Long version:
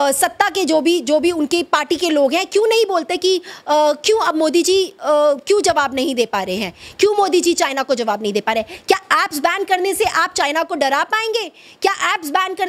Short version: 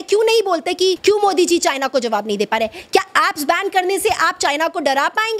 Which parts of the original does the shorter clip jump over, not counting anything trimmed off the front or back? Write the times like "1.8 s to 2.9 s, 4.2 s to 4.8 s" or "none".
3.4 s to 6.9 s